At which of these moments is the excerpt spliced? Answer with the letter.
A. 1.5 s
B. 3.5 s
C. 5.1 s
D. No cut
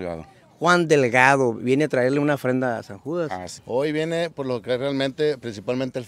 B